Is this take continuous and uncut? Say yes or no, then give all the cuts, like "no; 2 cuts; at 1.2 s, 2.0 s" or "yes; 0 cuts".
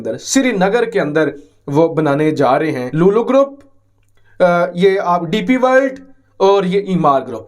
no; 1 cut; at 2.8 s